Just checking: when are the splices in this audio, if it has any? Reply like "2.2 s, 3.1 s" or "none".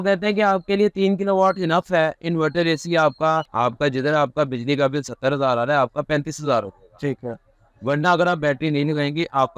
3.5 s